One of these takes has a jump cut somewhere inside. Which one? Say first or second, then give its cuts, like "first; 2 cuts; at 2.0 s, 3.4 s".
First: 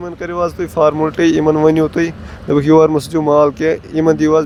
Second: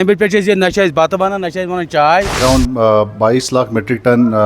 second; 1 cut; at 2.4 s